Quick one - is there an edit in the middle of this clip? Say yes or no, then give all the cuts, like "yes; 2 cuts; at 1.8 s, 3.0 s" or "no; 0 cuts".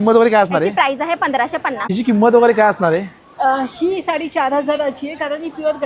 yes; 1 cut; at 1.8 s